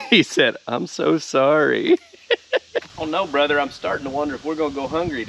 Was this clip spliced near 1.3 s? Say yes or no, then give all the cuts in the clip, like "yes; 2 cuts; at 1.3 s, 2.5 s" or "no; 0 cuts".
no; 1 cut; at 2.9 s